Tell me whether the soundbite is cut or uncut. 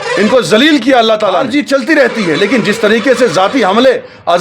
cut